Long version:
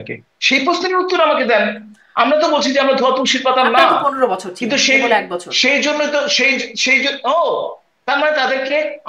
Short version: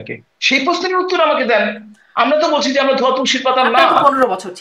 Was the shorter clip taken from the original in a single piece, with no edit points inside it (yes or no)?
yes